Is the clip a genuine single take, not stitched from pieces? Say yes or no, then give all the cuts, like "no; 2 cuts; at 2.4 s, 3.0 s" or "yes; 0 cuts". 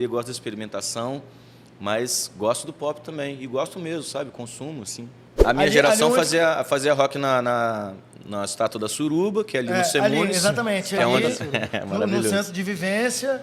no; 1 cut; at 5.3 s